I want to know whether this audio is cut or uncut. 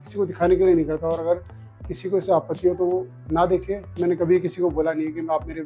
uncut